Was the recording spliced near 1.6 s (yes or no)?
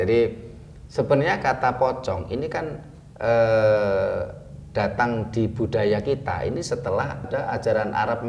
no